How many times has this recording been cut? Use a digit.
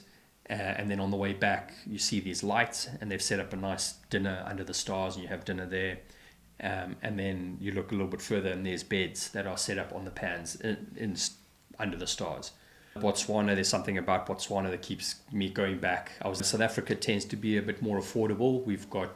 2